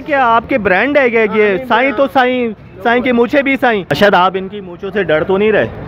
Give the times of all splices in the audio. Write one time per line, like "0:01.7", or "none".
0:03.9